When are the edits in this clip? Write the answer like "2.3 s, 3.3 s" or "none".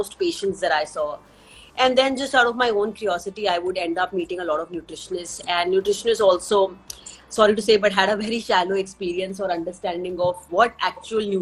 none